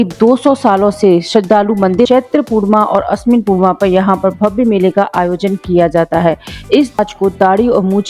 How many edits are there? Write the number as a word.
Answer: two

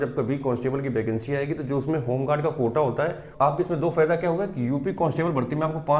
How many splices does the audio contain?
one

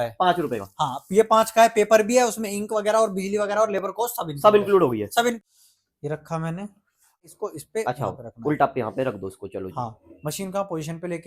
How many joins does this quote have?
two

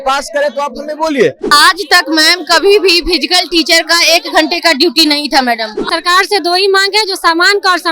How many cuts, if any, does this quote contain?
two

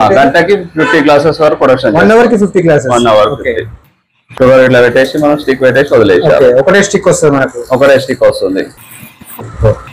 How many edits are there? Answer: one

